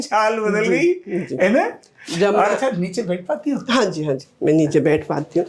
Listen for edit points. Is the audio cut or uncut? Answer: uncut